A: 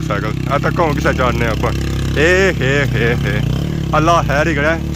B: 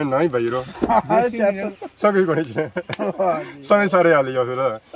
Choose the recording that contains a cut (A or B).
B